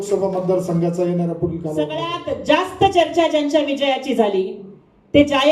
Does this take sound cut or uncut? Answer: cut